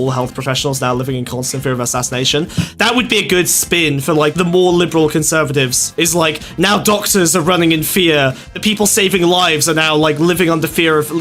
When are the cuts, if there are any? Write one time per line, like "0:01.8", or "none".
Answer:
0:02.8
0:04.3
0:06.0
0:08.5